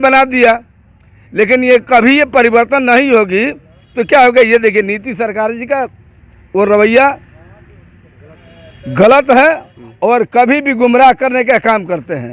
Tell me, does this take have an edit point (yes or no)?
no